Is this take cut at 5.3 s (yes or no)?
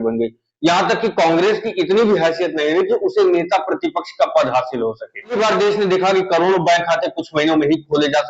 yes